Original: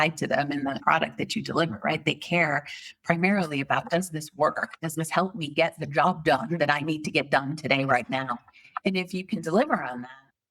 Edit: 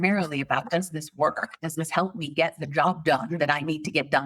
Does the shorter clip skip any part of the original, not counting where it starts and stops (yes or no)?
no